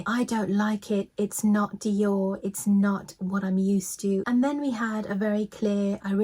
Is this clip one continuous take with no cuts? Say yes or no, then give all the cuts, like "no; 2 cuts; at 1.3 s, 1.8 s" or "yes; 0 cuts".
no; 1 cut; at 4.2 s